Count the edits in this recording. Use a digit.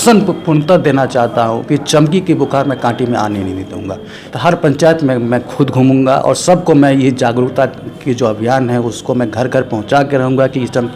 1